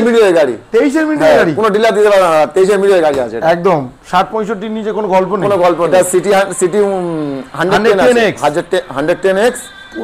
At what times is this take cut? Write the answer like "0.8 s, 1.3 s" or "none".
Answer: 5.9 s